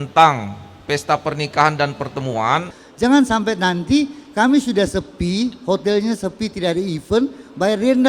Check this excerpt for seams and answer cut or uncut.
cut